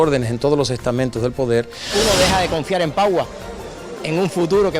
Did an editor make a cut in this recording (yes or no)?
yes